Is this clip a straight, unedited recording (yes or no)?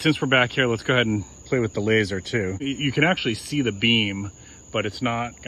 no